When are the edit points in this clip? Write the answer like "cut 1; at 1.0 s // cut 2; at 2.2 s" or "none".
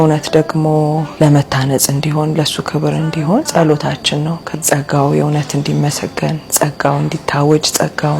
cut 1; at 1.1 s // cut 2; at 3.5 s